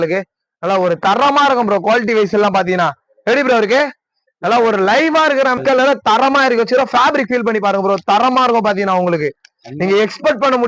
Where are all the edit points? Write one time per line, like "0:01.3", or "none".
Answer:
0:05.6